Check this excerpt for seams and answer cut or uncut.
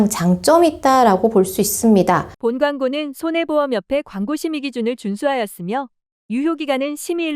cut